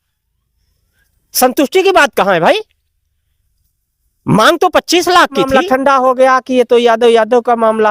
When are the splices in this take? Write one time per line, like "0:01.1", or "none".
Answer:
0:05.5